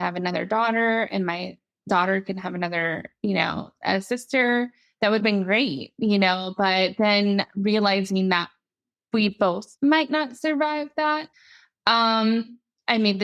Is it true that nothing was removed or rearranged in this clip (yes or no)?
no